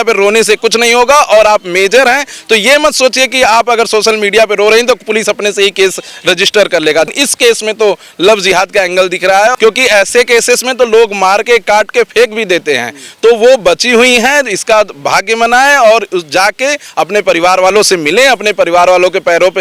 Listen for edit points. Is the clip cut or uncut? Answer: cut